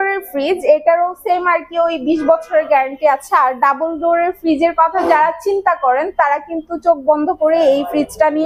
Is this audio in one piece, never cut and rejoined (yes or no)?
yes